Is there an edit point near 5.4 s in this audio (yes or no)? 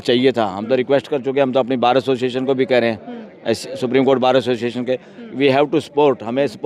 no